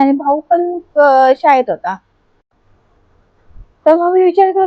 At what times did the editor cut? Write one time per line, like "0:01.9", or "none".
0:02.3